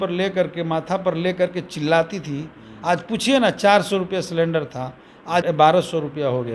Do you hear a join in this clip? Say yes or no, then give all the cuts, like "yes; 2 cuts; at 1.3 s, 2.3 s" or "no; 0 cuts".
yes; 1 cut; at 5.4 s